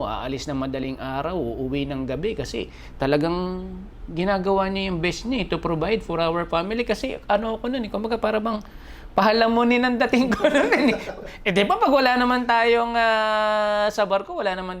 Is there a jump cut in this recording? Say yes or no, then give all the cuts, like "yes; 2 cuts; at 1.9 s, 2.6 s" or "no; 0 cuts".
no; 0 cuts